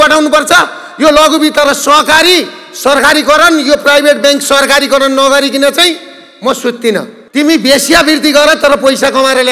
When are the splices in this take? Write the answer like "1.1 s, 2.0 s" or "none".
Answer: 7.2 s